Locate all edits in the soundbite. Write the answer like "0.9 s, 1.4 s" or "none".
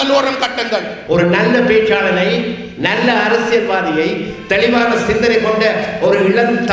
0.9 s